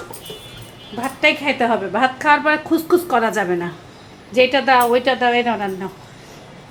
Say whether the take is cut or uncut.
uncut